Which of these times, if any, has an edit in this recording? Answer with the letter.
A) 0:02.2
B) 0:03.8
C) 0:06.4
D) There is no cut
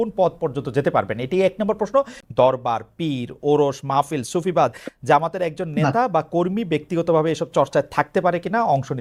A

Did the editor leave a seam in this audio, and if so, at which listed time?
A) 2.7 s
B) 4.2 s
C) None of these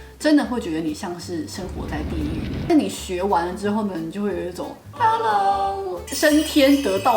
A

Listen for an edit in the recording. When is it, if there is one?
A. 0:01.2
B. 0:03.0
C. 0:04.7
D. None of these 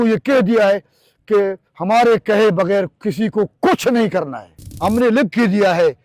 C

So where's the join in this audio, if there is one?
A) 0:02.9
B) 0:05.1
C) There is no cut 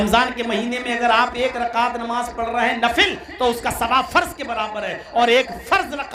C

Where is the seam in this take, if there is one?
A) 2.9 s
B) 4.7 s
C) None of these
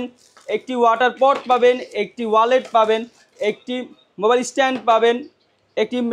C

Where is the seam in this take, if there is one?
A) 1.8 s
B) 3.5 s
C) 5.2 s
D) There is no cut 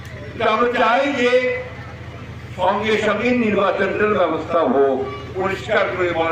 C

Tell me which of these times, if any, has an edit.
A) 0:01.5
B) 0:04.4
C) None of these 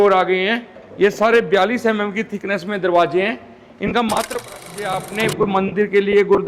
B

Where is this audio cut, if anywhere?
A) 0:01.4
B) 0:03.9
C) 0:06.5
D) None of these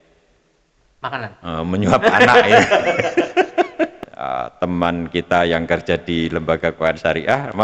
B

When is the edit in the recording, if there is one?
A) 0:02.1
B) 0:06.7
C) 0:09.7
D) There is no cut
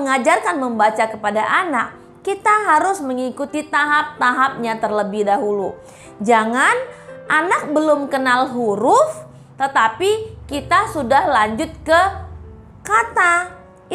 D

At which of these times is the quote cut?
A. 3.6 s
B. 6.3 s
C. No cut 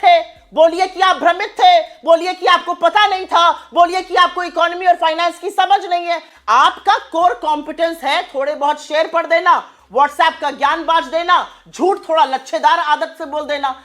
B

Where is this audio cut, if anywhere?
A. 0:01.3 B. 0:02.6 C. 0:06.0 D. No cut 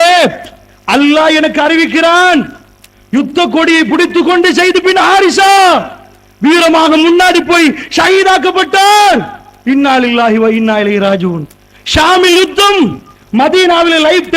A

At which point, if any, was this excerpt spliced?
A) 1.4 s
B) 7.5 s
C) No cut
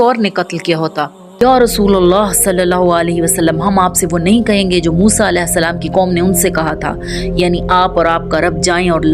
A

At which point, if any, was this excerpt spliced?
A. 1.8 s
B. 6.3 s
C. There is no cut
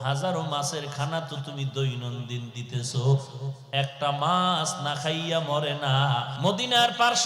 B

